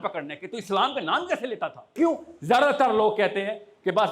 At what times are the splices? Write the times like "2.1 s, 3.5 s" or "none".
1.9 s

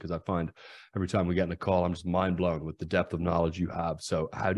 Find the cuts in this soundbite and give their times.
none

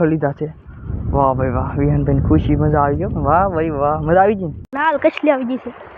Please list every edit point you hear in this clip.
4.6 s

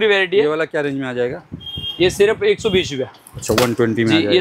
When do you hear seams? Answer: none

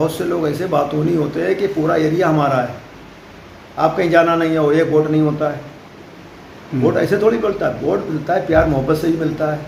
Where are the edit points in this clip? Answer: none

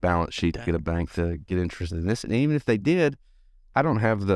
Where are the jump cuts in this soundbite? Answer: none

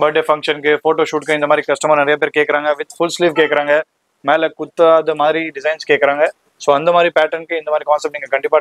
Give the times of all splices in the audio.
none

